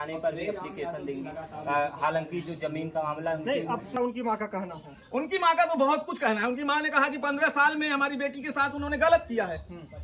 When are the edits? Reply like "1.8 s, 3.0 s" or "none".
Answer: 4.0 s